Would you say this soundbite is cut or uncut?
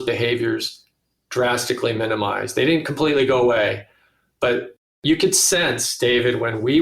cut